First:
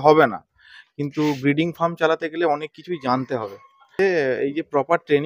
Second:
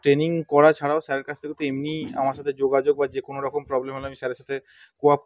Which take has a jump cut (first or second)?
first